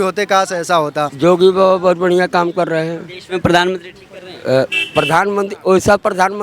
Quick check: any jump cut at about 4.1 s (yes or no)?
no